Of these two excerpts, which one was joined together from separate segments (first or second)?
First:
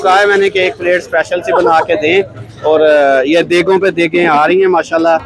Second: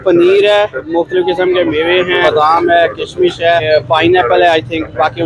second